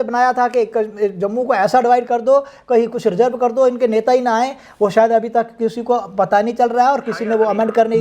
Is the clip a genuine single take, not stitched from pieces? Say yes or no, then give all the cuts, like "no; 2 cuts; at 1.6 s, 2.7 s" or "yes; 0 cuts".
yes; 0 cuts